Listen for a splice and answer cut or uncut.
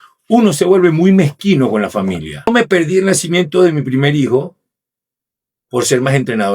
cut